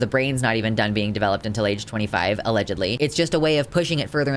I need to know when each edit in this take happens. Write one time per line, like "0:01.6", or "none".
0:03.0